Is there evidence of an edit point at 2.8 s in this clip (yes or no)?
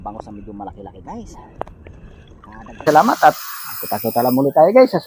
yes